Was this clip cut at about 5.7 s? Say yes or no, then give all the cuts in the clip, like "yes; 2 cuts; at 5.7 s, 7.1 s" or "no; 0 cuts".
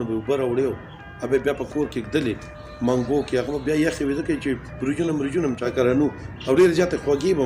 yes; 1 cut; at 5.7 s